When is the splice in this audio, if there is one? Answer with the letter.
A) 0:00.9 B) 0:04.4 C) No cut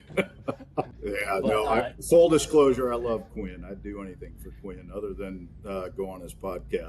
A